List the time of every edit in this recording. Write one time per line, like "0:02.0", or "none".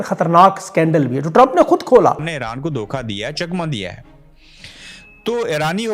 0:02.3